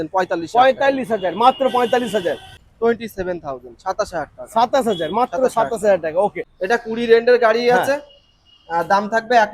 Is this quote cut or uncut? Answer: cut